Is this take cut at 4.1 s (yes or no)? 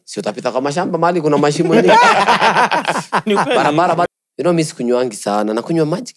yes